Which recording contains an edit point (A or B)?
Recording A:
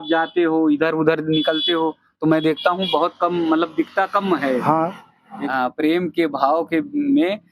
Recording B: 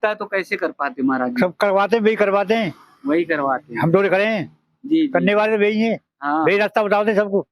A